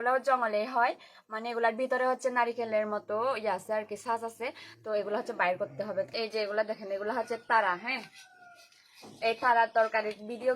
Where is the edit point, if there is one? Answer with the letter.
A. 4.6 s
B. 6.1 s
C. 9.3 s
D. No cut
B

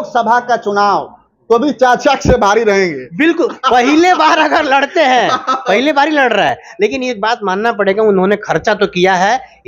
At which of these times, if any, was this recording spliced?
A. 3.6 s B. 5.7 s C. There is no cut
C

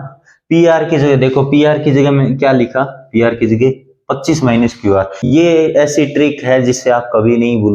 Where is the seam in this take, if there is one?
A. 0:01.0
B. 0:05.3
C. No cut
B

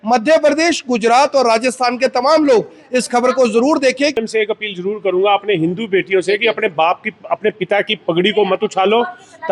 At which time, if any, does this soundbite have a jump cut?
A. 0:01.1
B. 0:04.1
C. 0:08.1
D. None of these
B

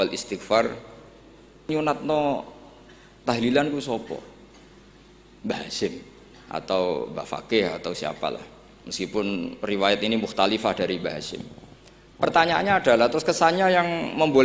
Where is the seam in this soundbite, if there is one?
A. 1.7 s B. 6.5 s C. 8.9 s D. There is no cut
A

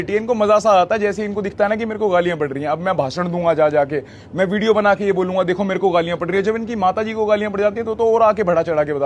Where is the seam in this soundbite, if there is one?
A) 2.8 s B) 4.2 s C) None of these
C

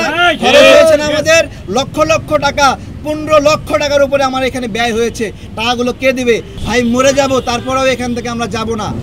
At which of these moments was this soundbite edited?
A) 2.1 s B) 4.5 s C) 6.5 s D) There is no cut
C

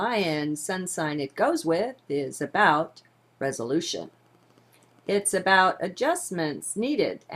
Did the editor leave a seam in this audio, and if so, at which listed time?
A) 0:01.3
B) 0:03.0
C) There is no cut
A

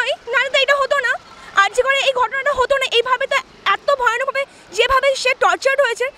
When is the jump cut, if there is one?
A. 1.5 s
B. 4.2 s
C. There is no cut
C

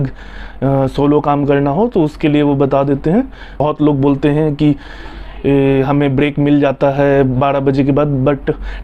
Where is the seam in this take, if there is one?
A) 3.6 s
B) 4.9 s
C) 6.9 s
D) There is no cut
A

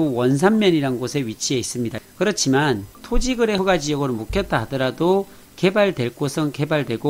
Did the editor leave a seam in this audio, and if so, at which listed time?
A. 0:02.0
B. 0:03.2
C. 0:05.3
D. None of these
A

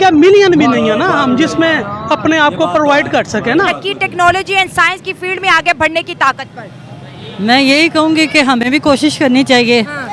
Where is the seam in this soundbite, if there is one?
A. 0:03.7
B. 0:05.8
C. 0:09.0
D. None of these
A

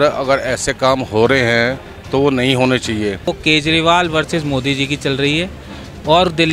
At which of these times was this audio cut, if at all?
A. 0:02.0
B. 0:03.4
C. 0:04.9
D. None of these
B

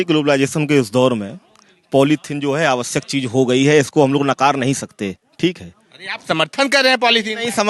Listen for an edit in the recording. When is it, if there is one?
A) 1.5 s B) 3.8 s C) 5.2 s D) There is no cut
D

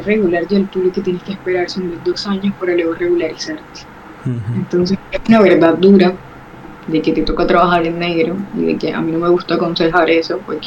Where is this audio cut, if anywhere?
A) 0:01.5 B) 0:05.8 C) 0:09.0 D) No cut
D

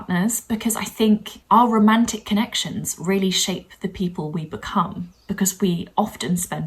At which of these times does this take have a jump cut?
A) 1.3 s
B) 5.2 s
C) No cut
A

